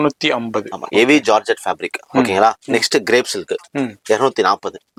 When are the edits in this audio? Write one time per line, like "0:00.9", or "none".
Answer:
none